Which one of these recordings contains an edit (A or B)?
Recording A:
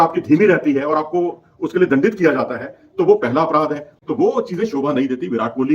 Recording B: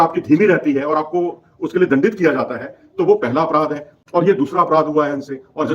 A